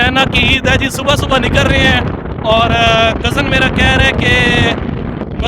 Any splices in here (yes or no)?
no